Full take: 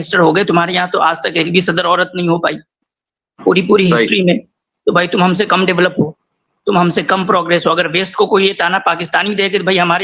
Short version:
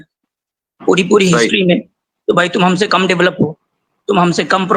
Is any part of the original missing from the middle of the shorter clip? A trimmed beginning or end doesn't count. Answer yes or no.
no